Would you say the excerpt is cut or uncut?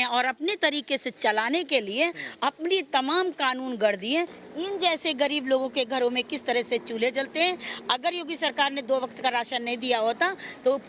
cut